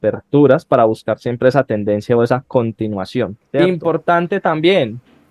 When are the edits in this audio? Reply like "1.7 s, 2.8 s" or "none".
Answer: 3.4 s